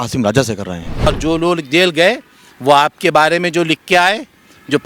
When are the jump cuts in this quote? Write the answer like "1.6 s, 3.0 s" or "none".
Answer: 1.1 s